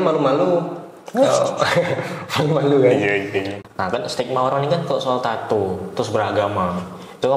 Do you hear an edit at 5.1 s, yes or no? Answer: no